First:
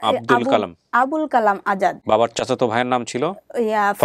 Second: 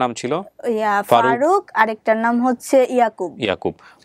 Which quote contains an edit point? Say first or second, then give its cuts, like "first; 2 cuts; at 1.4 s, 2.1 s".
first; 1 cut; at 2.0 s